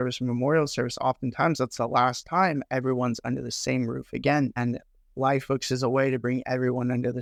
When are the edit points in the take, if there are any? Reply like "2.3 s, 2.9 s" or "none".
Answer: none